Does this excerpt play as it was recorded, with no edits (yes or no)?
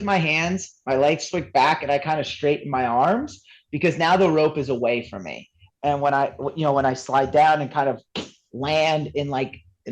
no